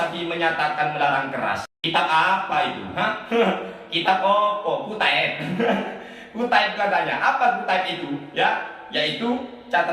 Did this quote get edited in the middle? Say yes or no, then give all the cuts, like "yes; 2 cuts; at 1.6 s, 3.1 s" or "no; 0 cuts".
yes; 1 cut; at 1.7 s